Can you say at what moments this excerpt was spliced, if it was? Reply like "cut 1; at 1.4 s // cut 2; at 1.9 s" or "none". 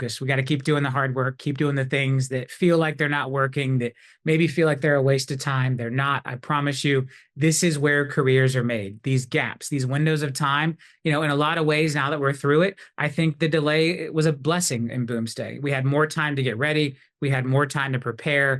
none